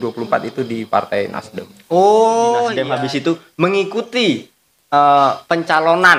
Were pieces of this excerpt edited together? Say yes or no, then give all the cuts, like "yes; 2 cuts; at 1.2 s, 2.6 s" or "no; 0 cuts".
yes; 1 cut; at 2.8 s